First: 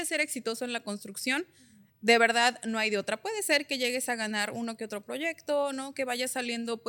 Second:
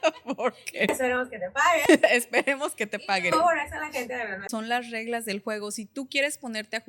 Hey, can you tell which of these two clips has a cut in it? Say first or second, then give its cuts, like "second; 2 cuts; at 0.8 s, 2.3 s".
second; 1 cut; at 4.5 s